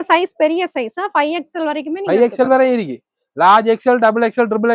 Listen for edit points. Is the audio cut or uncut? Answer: uncut